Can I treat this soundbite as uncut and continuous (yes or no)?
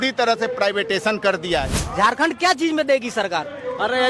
no